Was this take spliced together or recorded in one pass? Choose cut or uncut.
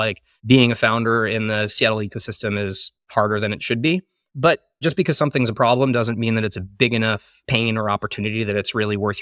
cut